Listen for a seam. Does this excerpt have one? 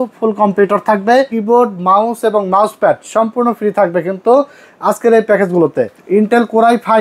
yes; 2 cuts; at 1.3 s, 5.9 s

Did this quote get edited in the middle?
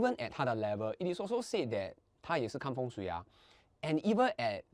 no; 0 cuts

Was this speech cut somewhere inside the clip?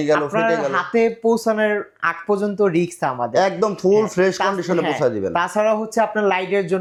no; 0 cuts

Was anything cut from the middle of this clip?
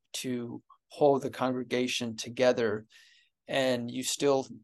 no; 0 cuts

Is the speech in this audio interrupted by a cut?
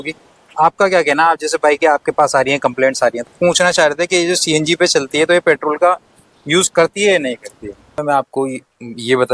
yes; 2 cuts; at 3.3 s, 7.9 s

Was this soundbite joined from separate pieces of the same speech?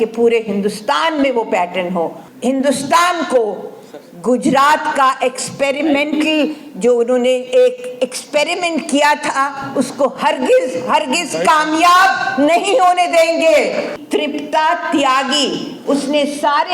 yes; 3 cuts; at 2.2 s, 9.6 s, 14.0 s

